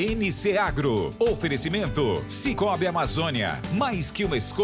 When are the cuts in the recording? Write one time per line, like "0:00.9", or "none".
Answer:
none